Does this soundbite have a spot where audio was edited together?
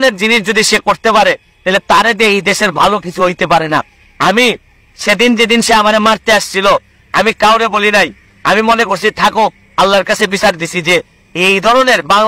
no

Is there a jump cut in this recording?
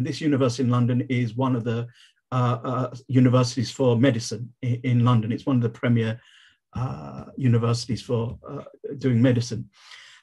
no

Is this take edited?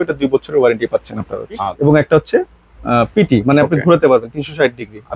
yes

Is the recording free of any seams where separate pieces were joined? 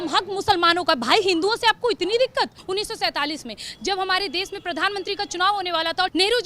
no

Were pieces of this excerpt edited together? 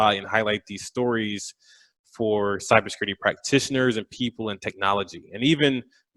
no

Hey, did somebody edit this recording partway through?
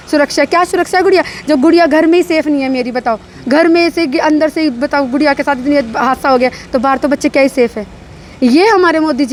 no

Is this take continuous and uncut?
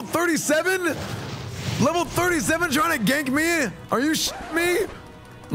no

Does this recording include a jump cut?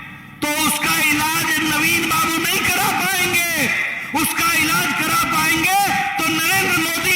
no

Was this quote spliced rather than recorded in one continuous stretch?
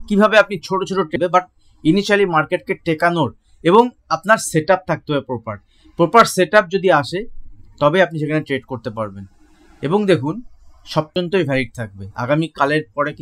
yes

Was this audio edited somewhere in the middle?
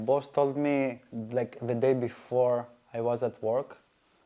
no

